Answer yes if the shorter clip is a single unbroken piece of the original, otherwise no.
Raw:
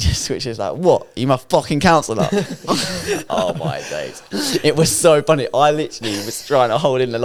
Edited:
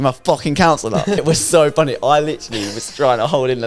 no